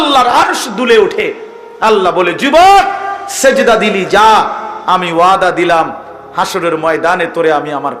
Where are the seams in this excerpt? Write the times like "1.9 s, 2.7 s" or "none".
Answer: none